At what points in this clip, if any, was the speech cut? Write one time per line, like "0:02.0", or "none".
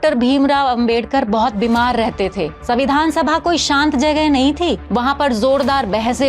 0:02.6
0:04.8

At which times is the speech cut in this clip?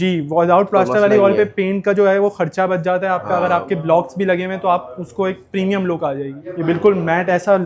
0:06.4

